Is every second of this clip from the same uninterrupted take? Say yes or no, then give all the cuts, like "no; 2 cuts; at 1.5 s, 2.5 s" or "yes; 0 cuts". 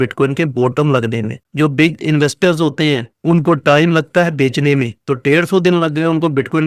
no; 1 cut; at 1.4 s